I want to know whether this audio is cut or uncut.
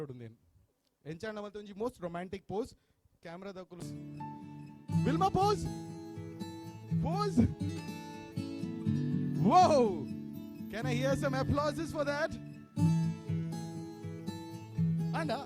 cut